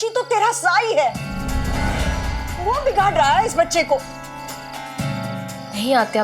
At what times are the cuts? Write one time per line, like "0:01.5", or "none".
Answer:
0:01.4